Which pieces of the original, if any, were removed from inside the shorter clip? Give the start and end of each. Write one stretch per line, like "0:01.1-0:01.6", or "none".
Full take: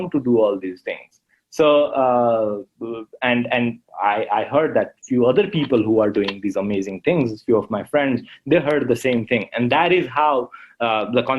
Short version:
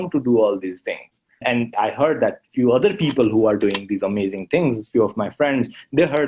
0:01.6-0:04.1